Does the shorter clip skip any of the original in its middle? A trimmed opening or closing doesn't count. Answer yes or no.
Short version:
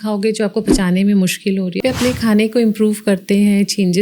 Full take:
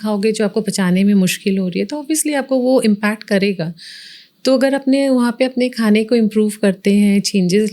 yes